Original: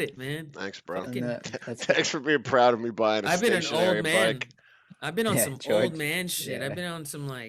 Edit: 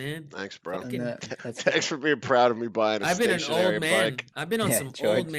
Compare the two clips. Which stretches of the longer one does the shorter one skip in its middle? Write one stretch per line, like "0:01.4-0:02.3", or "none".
0:04.5-0:04.9